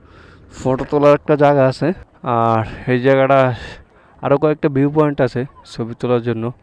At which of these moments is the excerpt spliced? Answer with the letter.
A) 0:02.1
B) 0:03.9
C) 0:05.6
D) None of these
A